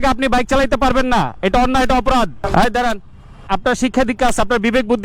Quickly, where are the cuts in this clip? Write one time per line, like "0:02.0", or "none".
0:02.4
0:03.4